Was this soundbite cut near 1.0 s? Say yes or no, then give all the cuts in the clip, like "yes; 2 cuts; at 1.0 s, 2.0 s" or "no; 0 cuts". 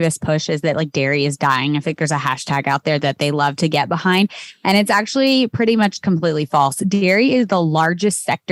no; 0 cuts